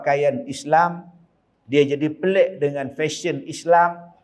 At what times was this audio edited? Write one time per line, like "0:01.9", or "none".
none